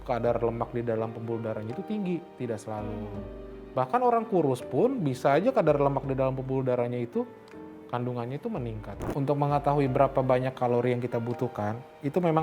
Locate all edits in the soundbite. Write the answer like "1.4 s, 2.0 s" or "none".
9.0 s